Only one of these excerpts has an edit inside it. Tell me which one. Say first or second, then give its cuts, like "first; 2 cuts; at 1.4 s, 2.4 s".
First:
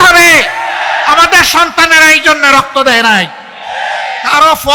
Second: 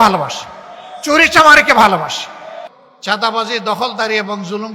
second; 1 cut; at 2.7 s